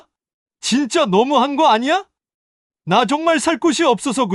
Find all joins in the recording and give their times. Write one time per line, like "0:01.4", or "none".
none